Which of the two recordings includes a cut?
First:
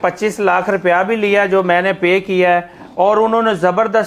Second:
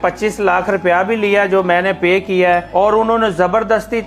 second; 1 cut; at 2.7 s

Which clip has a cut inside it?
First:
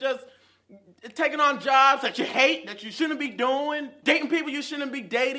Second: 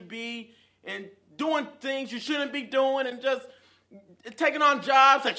first; 1 cut; at 3.9 s

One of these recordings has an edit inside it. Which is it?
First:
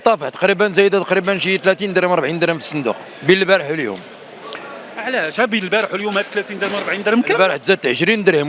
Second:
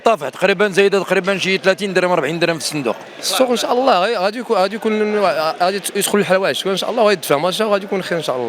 second; 1 cut; at 3.1 s

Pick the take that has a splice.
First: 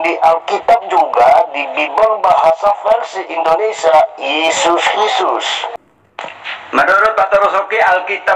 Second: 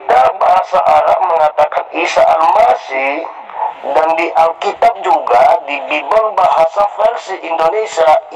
first; 1 cut; at 5.8 s

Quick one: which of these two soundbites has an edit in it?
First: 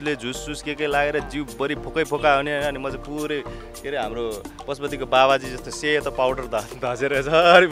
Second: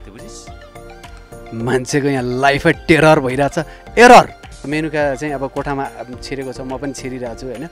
second; 1 cut; at 4.7 s

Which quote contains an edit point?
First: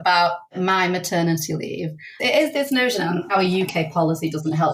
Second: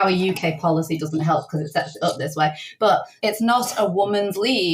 second; 1 cut; at 3.1 s

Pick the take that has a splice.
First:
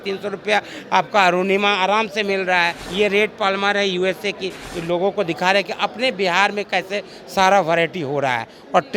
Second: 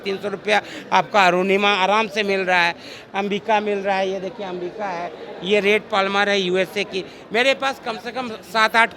first; 2 cuts; at 2.8 s, 4.6 s

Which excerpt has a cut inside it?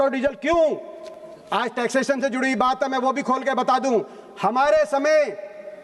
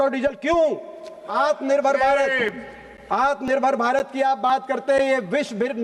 second; 1 cut; at 1.2 s

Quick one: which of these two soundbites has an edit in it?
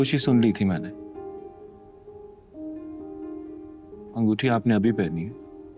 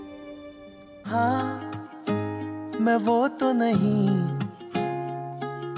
second; 1 cut; at 1.1 s

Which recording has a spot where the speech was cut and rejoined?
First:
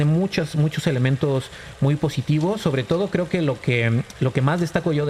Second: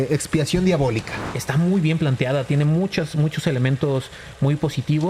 second; 1 cut; at 1.3 s

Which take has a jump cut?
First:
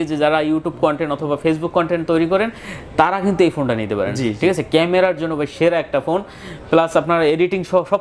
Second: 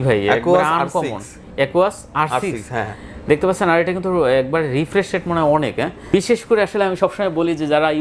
second; 1 cut; at 6.0 s

